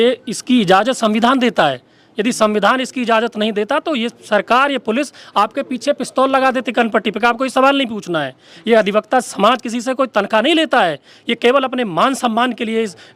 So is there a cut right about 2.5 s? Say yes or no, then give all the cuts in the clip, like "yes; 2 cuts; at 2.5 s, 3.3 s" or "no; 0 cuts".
no; 1 cut; at 8.6 s